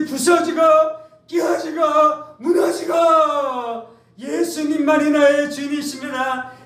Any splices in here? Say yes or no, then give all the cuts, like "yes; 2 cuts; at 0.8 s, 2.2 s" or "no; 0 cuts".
no; 0 cuts